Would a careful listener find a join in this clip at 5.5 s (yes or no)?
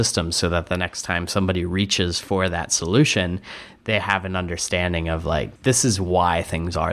yes